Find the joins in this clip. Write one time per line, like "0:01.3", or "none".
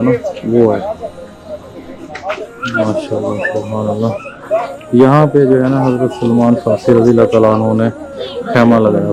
none